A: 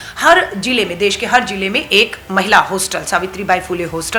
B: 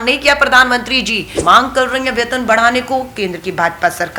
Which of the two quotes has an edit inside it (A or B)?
B